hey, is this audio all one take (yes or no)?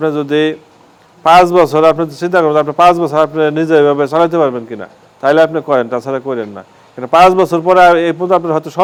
yes